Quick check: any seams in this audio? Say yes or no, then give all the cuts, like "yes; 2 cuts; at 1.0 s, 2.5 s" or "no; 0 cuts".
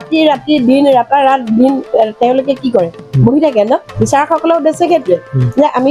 yes; 1 cut; at 3.9 s